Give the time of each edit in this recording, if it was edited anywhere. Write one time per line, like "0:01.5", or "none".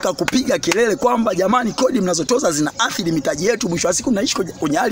none